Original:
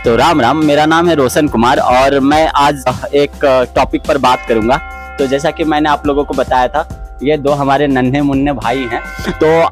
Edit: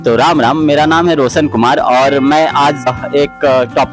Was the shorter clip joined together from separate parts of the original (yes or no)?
no